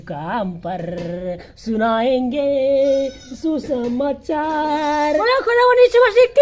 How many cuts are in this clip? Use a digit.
1